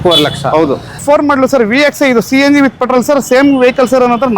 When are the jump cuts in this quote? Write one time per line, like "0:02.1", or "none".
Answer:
0:01.0